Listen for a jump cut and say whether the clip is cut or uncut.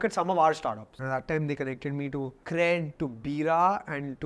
cut